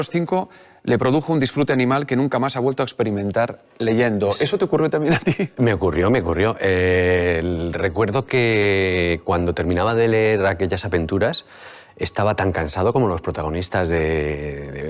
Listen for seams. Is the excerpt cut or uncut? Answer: uncut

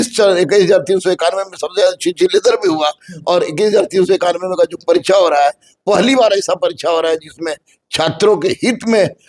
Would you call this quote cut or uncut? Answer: uncut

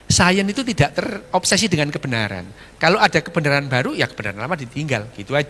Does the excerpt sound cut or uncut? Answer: uncut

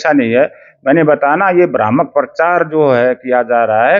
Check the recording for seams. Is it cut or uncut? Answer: uncut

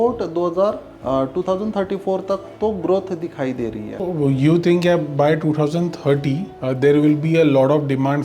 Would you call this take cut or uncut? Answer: cut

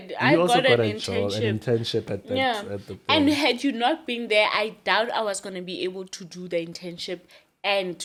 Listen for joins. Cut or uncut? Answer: uncut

